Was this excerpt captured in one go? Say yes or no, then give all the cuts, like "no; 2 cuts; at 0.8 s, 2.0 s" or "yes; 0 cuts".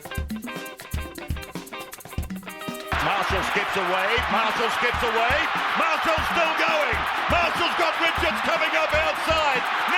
no; 1 cut; at 2.7 s